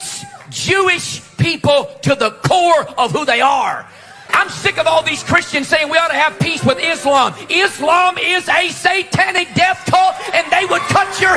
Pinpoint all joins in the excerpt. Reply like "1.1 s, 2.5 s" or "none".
4.3 s